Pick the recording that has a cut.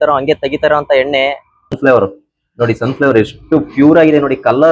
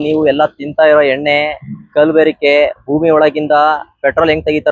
first; 1 cut; at 1.8 s

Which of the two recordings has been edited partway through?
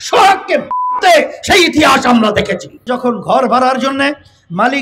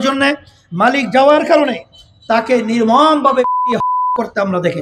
first; 1 cut; at 2.8 s

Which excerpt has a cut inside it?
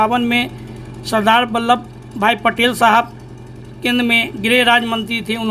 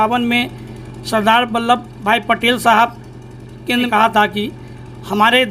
second; 2 cuts; at 1.9 s, 3.9 s

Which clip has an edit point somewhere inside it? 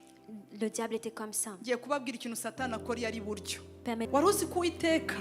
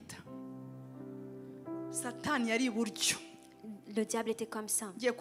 first; 1 cut; at 4.0 s

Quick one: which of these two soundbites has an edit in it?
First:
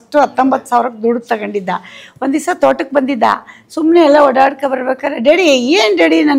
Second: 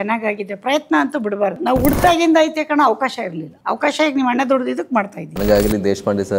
second; 3 cuts; at 1.6 s, 3.5 s, 5.2 s

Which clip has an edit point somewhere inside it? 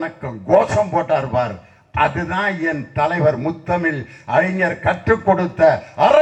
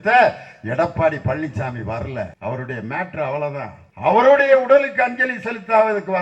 second; 2 cuts; at 2.3 s, 3.8 s

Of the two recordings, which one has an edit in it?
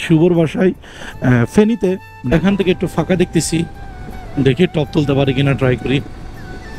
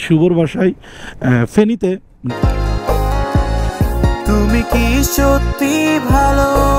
first; 1 cut; at 2.1 s

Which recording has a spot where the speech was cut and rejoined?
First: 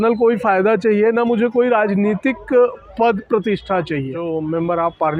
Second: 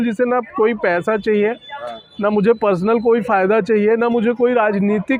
first; 1 cut; at 4.2 s

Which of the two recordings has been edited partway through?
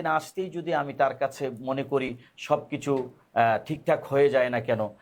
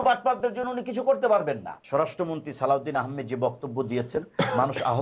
second; 1 cut; at 1.8 s

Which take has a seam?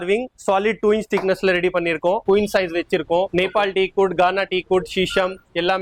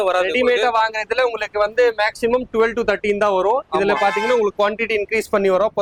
first; 2 cuts; at 2.2 s, 3.3 s

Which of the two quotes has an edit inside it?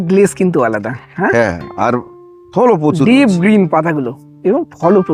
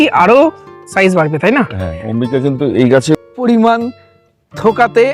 second; 1 cut; at 3.3 s

